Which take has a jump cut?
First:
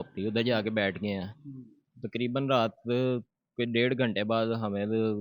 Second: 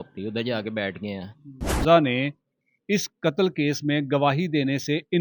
second; 1 cut; at 1.8 s

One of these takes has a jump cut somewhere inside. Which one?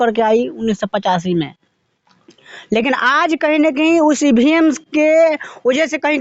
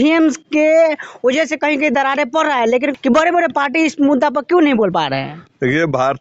second; 1 cut; at 2.9 s

